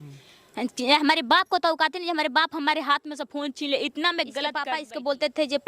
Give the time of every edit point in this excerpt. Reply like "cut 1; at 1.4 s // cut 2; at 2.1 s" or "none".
cut 1; at 4.6 s

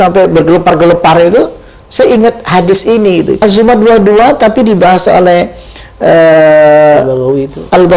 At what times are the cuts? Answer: cut 1; at 3.4 s

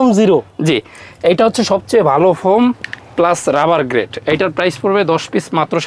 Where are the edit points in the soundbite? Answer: none

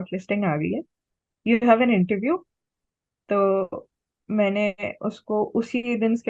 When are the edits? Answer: none

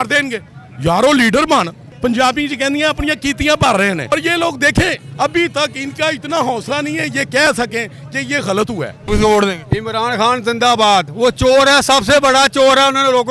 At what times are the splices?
cut 1; at 1.8 s // cut 2; at 4.0 s // cut 3; at 9.1 s

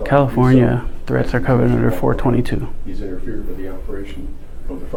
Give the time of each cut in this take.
none

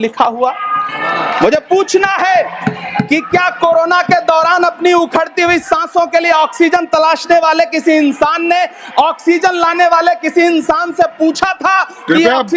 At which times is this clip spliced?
none

